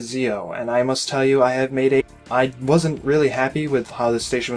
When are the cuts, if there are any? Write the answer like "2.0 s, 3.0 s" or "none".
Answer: none

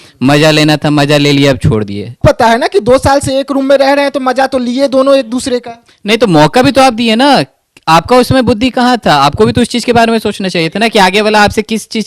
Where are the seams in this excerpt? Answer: 2.2 s

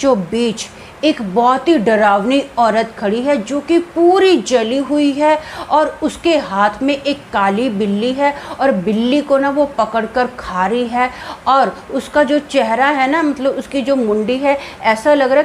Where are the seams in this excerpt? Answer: none

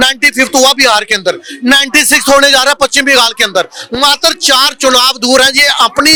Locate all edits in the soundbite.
none

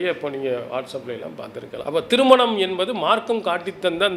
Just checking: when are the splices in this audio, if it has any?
1.8 s

